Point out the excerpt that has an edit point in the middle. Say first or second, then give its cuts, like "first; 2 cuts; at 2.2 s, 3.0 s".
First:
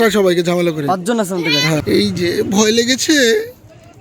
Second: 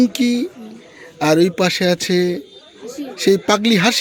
first; 1 cut; at 1.8 s